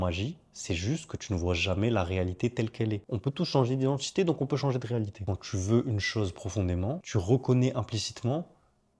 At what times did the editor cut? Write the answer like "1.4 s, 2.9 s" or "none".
3.0 s, 5.3 s

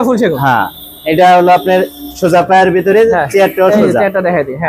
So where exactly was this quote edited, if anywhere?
none

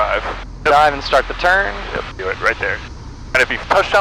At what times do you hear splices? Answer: 2.2 s

